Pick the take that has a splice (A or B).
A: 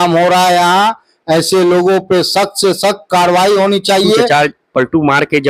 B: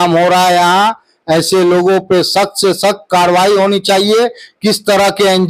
A